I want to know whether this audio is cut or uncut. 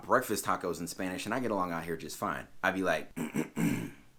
uncut